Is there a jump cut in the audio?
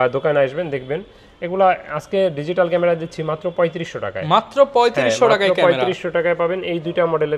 no; 0 cuts

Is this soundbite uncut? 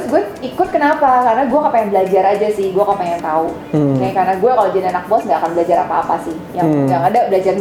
yes; 0 cuts

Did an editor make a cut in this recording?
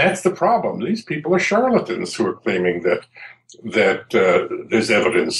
no; 0 cuts

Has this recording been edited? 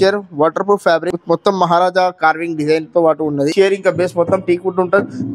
yes; 2 cuts; at 1.1 s, 3.5 s

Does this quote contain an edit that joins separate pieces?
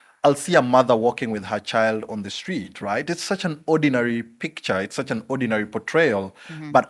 no; 0 cuts

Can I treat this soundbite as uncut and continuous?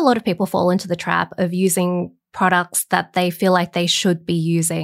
yes; 0 cuts

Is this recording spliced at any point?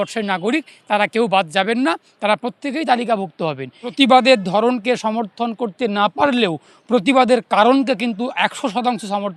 yes; 1 cut; at 3.9 s

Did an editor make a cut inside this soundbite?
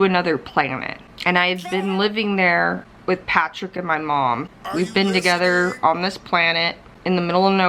yes; 2 cuts; at 2.9 s, 4.5 s

